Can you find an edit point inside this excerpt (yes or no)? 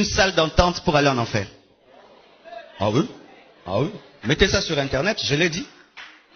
no